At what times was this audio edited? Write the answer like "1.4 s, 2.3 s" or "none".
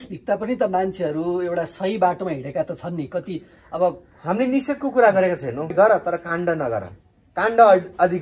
5.7 s